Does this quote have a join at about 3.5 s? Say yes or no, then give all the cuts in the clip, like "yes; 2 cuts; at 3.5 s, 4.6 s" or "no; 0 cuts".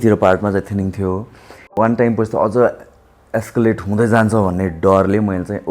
no; 1 cut; at 1.7 s